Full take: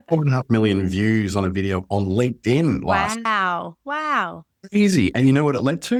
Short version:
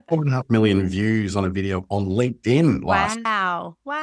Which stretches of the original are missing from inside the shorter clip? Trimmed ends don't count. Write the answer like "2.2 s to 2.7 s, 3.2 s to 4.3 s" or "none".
none